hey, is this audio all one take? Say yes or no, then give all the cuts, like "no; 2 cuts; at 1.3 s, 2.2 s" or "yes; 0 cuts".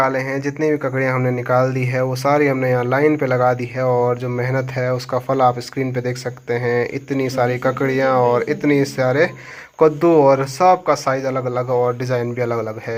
yes; 0 cuts